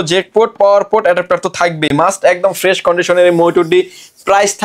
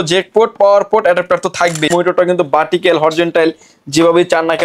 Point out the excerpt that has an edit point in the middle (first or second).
second